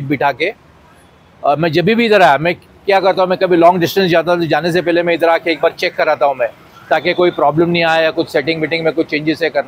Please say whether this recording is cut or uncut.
uncut